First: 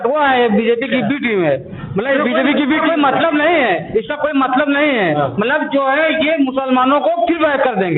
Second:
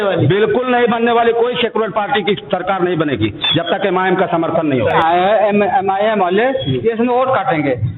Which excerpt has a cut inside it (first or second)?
second